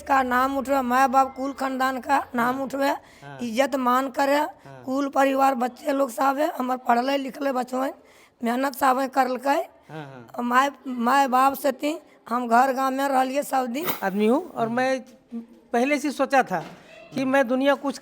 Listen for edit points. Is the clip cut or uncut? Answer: cut